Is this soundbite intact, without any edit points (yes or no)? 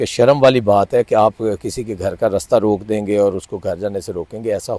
yes